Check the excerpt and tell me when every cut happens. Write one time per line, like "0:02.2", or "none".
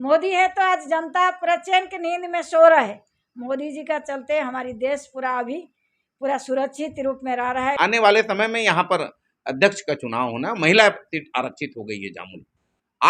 0:07.8